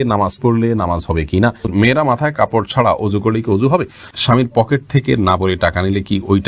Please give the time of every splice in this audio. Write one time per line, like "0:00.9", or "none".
0:01.7
0:04.1

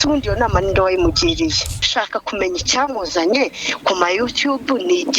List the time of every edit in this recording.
0:01.9

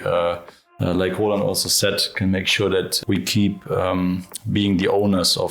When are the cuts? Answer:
0:02.9

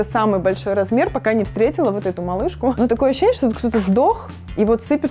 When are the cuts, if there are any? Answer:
0:02.8

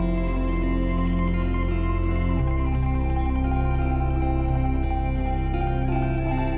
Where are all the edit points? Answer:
none

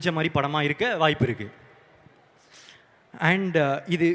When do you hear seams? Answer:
none

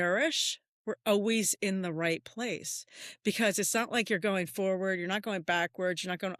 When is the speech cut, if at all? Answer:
none

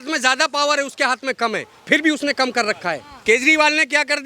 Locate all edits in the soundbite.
0:03.1

